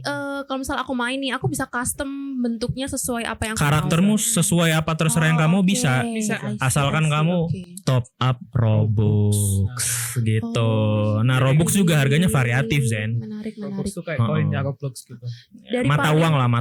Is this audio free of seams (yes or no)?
yes